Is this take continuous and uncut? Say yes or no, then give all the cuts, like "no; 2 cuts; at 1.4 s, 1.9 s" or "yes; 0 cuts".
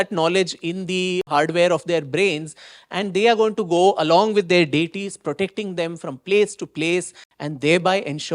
no; 1 cut; at 1.3 s